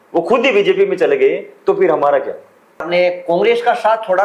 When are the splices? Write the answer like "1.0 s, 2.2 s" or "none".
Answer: 2.9 s